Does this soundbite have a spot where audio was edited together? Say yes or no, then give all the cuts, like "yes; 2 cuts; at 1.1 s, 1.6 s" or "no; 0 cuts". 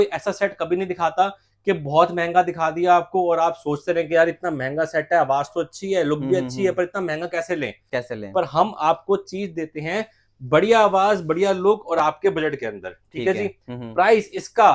no; 0 cuts